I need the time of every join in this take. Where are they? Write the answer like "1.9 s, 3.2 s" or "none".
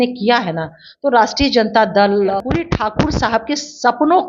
2.3 s